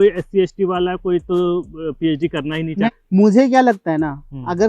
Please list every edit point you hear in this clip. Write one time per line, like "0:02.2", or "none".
0:02.9